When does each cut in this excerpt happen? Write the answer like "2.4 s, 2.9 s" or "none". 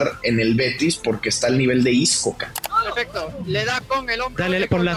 2.5 s